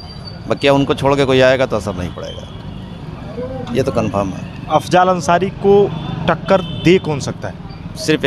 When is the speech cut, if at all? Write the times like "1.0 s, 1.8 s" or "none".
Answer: none